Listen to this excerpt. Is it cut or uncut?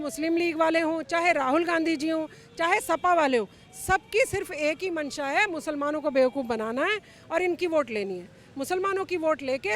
uncut